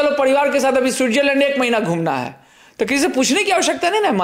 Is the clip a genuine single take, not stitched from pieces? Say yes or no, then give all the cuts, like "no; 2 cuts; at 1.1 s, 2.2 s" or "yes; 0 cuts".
yes; 0 cuts